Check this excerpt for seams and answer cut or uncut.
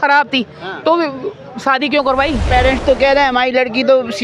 cut